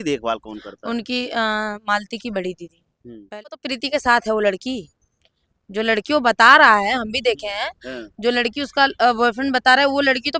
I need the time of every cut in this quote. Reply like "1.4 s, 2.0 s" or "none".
3.5 s